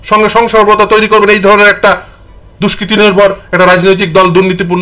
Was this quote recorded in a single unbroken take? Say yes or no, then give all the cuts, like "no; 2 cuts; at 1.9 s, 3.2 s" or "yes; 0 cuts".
yes; 0 cuts